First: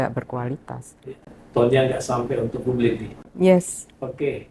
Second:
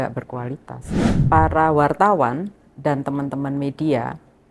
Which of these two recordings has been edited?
second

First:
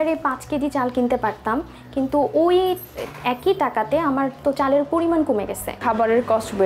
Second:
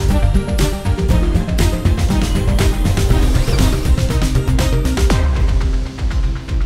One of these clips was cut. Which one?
first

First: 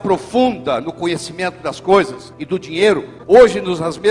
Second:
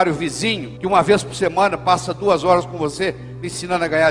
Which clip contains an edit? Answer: first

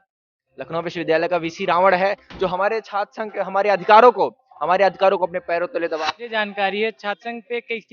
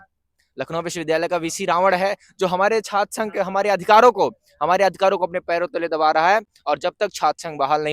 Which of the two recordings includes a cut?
first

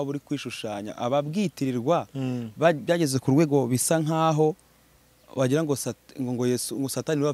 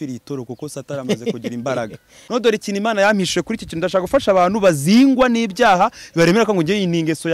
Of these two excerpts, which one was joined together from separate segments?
second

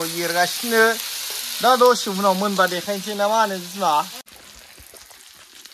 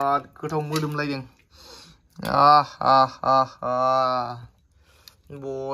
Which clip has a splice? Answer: first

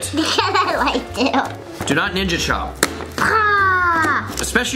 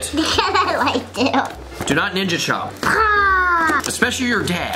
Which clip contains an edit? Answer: second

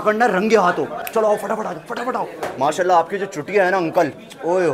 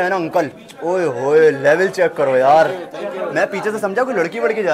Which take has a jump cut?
first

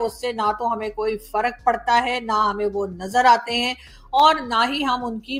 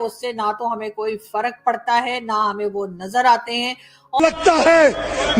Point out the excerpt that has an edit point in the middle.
second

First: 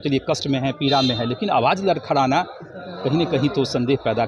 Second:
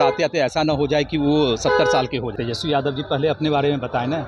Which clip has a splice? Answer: second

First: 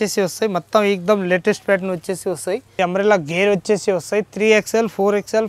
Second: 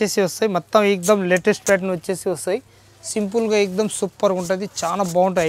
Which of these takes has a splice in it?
first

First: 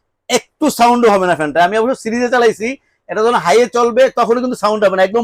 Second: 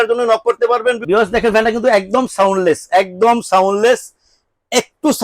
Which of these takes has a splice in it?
second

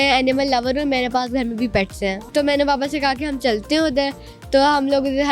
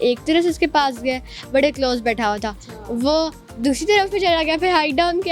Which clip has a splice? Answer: first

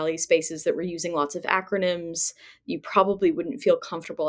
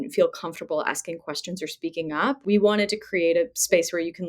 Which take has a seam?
second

